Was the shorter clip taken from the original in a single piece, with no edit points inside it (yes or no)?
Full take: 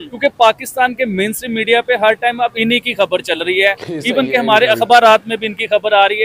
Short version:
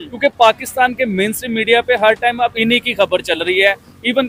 yes